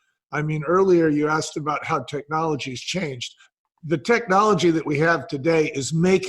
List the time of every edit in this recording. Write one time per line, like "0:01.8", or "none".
0:03.4